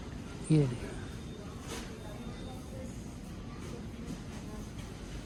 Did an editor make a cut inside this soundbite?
no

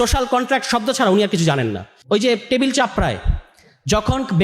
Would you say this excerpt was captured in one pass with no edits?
no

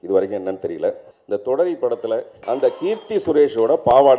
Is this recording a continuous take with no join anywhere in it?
no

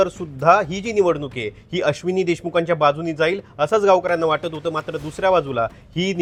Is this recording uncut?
yes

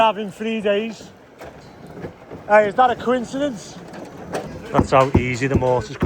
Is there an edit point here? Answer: yes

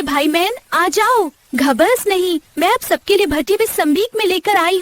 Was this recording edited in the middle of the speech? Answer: no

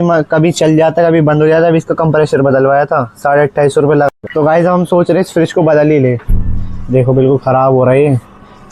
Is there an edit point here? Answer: yes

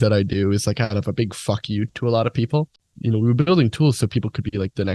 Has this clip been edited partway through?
yes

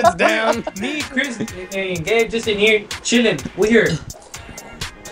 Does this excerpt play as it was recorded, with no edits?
yes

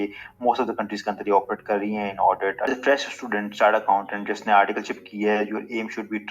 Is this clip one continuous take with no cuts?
no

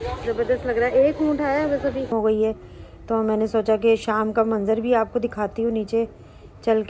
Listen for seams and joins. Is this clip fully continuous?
no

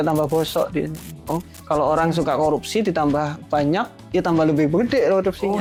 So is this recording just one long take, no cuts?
yes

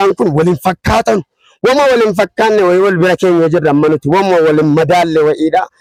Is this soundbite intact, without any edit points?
yes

